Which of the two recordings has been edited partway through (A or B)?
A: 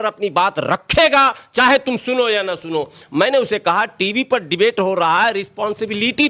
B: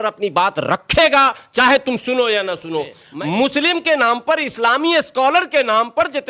B